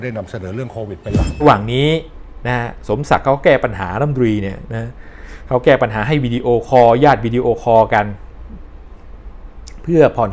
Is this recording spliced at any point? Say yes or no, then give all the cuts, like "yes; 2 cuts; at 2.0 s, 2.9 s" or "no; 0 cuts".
yes; 1 cut; at 1.4 s